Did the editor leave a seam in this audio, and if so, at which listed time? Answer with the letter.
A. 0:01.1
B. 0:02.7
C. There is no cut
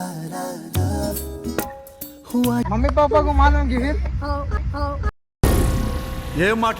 B